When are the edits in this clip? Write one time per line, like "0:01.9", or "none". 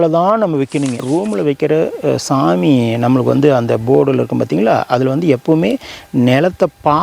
0:01.1